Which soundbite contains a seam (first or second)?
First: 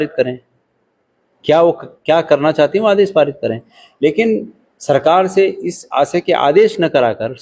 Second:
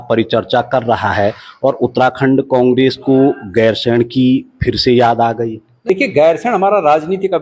second